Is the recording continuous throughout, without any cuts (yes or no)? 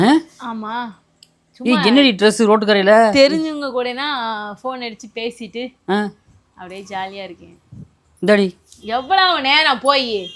yes